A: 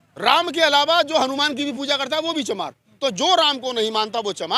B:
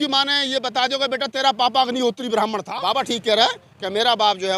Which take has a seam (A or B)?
B